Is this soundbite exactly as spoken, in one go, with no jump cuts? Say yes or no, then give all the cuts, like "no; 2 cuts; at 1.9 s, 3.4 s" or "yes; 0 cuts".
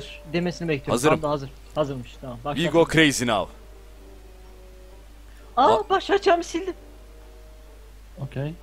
yes; 0 cuts